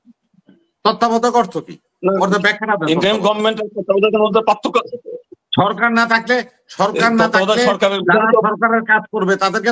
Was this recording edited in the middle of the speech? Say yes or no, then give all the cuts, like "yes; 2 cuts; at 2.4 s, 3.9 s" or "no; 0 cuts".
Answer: no; 0 cuts